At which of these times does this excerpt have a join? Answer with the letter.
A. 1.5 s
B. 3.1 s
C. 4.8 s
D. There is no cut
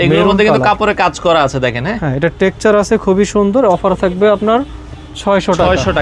D